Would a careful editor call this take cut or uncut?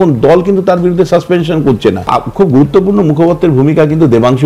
cut